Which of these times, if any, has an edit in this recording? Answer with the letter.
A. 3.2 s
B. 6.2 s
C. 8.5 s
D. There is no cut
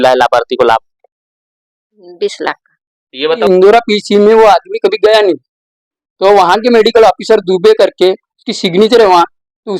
A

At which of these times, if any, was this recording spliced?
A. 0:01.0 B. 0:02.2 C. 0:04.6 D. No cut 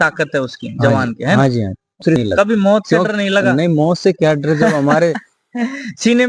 B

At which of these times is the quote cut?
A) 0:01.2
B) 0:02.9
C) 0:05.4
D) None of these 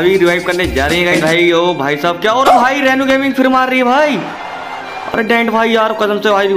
A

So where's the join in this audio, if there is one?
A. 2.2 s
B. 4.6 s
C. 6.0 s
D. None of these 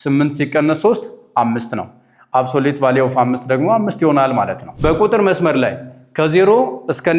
B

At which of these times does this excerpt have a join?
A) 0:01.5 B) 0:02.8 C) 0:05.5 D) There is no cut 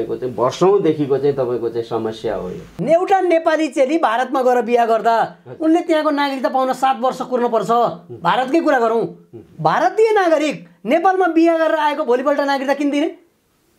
B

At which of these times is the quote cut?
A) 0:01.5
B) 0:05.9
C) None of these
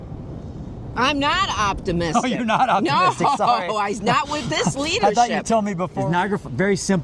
B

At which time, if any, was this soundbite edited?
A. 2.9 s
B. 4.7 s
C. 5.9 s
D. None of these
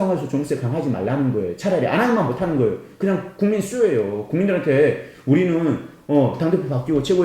D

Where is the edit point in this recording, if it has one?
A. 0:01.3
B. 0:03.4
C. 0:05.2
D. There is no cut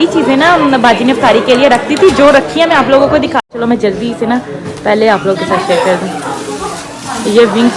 B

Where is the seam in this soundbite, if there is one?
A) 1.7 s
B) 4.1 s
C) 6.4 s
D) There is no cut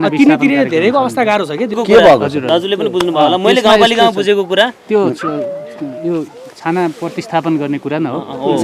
D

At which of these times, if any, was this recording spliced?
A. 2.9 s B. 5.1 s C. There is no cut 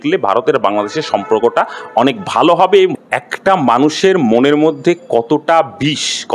A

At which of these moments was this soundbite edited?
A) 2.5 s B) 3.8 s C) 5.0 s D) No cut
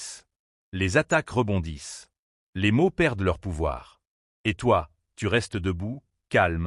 D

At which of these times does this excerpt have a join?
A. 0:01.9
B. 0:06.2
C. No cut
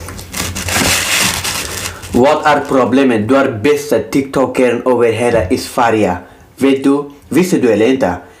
C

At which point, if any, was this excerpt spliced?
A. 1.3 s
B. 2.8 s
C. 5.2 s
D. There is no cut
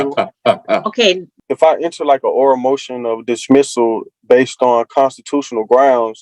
A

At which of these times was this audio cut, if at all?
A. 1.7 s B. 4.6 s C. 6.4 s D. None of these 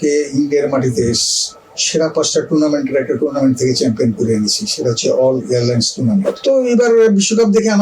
C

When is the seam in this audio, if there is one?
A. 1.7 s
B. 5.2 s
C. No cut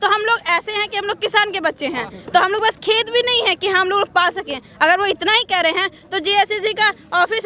C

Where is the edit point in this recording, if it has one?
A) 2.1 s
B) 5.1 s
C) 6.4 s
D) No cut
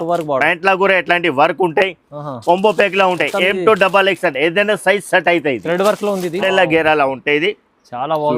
C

